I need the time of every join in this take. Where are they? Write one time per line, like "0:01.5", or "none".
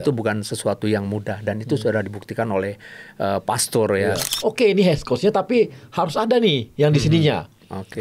0:04.3